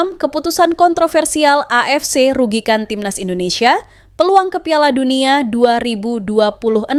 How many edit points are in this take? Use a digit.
0